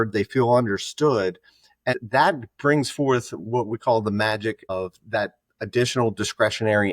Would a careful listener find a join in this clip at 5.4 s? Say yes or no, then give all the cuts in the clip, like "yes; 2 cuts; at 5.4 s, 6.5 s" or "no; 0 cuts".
no; 1 cut; at 1.9 s